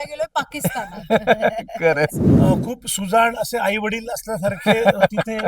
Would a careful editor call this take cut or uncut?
cut